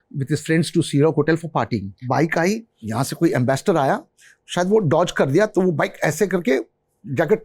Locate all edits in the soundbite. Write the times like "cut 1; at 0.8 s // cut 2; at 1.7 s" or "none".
cut 1; at 1.9 s // cut 2; at 2.8 s